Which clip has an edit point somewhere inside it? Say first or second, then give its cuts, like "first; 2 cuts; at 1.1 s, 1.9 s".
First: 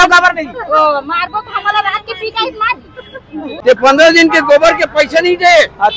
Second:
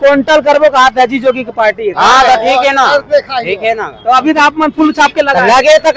first; 1 cut; at 3.5 s